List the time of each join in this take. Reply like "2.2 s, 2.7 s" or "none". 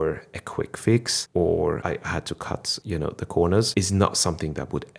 1.2 s, 1.8 s, 2.7 s, 3.7 s